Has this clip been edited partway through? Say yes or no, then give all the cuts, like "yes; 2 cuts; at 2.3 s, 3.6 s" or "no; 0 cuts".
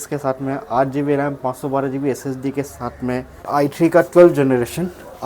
yes; 1 cut; at 3.5 s